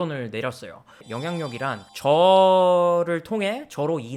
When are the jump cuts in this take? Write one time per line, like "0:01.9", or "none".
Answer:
none